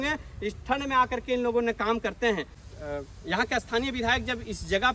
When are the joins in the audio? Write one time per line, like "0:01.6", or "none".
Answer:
0:02.6